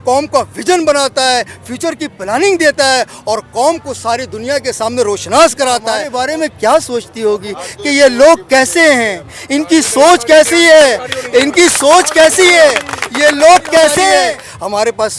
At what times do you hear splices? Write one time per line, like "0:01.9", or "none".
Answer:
0:06.0
0:14.1